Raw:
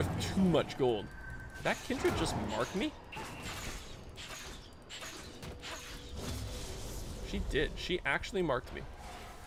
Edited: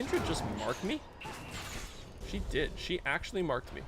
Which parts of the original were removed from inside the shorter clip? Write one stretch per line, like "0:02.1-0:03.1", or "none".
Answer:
0:04.1-0:07.1